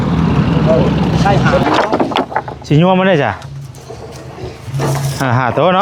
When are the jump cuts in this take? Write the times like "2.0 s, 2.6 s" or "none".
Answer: 1.6 s